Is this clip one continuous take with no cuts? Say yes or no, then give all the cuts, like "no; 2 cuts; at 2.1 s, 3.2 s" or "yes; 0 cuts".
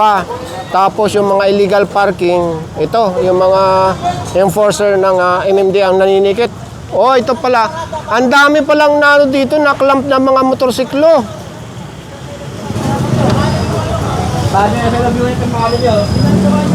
yes; 0 cuts